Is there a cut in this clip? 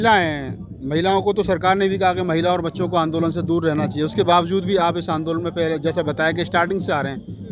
no; 0 cuts

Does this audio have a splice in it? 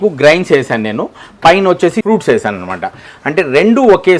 yes; 1 cut; at 2.0 s

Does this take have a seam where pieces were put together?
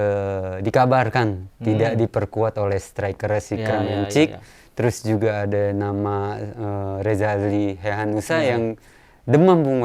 no; 0 cuts

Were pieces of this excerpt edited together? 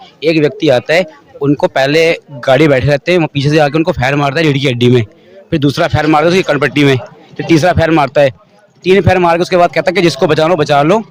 no; 0 cuts

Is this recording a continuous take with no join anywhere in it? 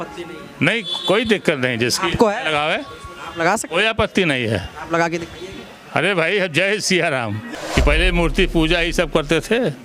no; 1 cut; at 7.5 s

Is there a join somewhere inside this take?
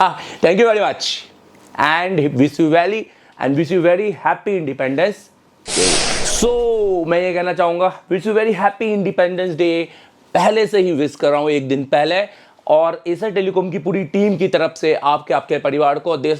yes; 1 cut; at 6.2 s

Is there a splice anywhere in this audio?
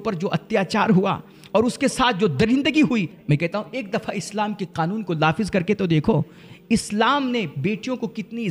no; 0 cuts

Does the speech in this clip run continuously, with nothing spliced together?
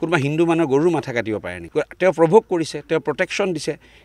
no; 1 cut; at 1.6 s

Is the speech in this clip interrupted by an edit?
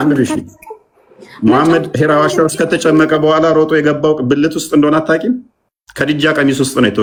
no; 0 cuts

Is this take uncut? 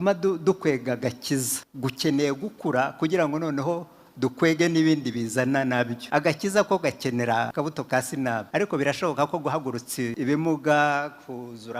no; 5 cuts; at 1.6 s, 6.0 s, 7.5 s, 8.5 s, 10.1 s

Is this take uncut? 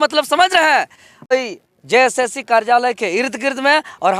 no; 1 cut; at 1.3 s

